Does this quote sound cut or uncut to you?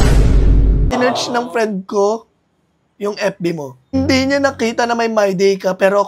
cut